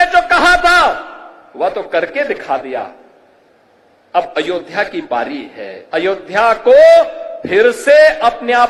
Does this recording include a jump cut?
no; 0 cuts

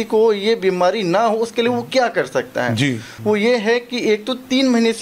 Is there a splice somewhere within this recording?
yes; 1 cut; at 3.1 s

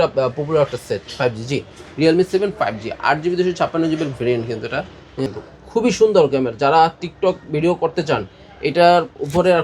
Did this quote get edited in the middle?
yes; 1 cut; at 5.3 s

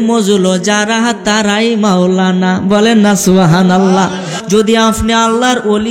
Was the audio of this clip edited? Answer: yes; 1 cut; at 4.4 s

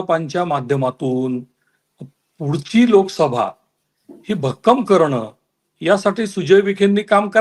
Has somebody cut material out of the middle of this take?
no; 0 cuts

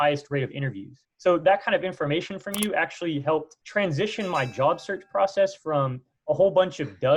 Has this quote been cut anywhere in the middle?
no; 0 cuts

